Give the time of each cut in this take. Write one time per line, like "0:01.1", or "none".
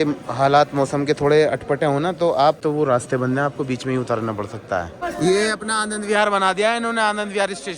0:02.6
0:05.0